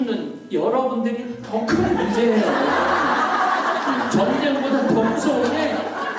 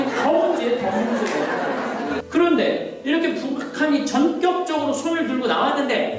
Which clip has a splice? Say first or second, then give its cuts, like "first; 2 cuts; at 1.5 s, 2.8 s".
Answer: second; 1 cut; at 2.2 s